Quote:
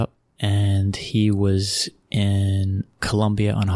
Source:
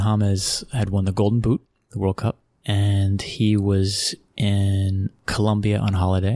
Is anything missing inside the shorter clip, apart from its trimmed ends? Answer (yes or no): no